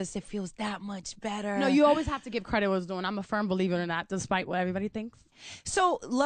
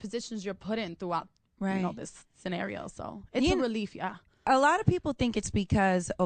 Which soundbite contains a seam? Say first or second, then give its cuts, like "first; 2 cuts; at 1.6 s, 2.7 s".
first; 1 cut; at 3.0 s